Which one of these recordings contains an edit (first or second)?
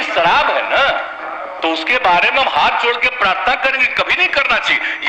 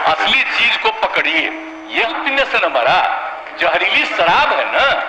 second